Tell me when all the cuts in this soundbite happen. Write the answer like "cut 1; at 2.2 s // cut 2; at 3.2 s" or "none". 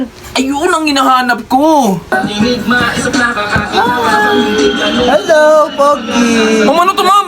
cut 1; at 2.1 s